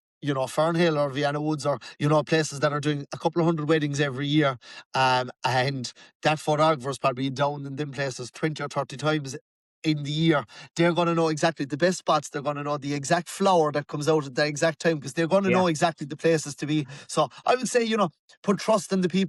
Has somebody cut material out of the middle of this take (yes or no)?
no